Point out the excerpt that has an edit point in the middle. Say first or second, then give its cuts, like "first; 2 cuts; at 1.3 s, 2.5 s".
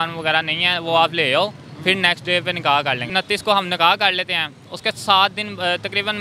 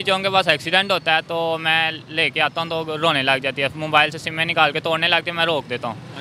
first; 1 cut; at 3.1 s